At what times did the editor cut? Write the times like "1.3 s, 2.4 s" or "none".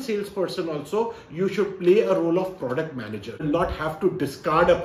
3.4 s